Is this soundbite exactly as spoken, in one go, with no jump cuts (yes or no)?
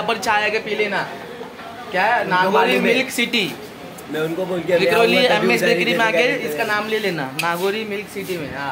yes